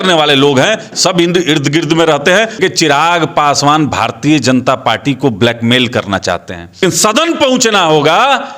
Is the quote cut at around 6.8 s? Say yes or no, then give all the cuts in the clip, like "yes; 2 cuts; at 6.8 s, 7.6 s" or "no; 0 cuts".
yes; 2 cuts; at 2.6 s, 6.8 s